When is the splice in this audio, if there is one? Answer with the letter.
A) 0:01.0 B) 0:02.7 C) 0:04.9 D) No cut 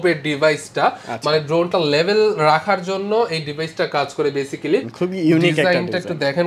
C